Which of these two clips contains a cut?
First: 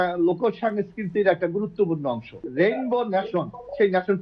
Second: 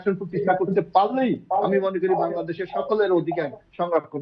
first; 1 cut; at 2.4 s

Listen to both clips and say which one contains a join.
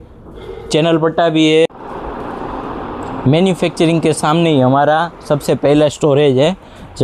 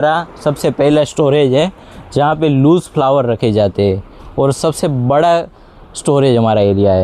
first; 1 cut; at 1.7 s

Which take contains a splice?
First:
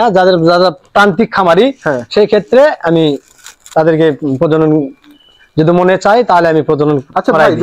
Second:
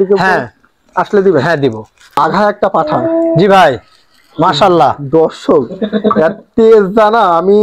second; 1 cut; at 2.2 s

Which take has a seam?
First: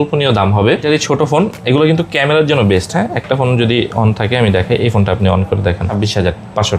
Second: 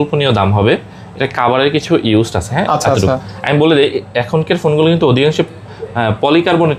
first; 2 cuts; at 0.8 s, 5.9 s

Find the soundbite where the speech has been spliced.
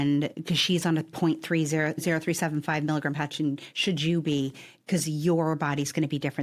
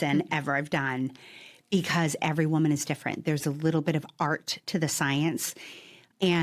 first; 2 cuts; at 2.0 s, 5.5 s

